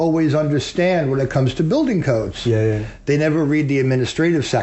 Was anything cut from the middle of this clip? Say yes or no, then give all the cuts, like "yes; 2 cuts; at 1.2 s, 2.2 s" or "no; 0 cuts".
no; 0 cuts